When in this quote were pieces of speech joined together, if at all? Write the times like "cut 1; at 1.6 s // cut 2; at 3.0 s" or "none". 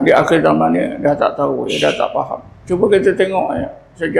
cut 1; at 2.5 s

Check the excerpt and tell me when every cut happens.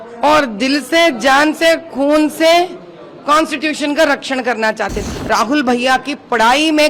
cut 1; at 5.0 s

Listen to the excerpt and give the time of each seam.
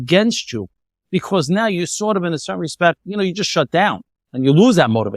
cut 1; at 4.2 s

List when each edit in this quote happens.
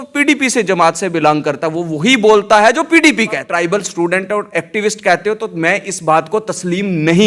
cut 1; at 3.5 s

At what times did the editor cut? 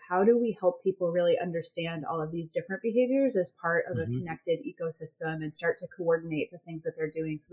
none

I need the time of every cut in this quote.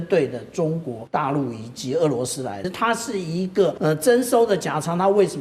cut 1; at 1.0 s // cut 2; at 2.7 s // cut 3; at 3.8 s

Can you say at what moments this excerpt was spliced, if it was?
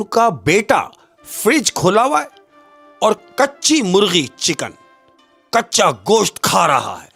none

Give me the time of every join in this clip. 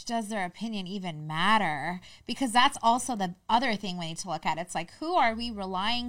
none

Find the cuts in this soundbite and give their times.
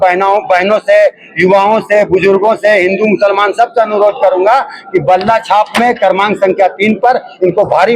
none

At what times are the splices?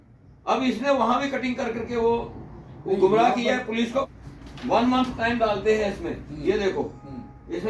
cut 1; at 4.0 s

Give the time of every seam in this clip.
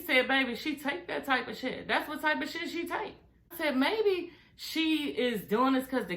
cut 1; at 3.5 s

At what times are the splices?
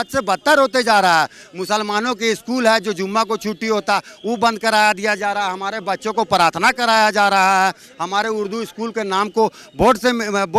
none

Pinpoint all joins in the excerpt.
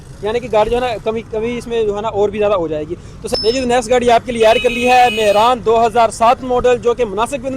cut 1; at 3.3 s

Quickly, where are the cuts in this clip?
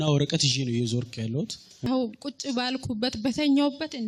cut 1; at 1.9 s

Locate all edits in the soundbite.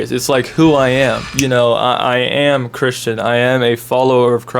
cut 1; at 1.3 s

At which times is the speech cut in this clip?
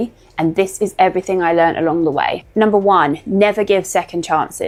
none

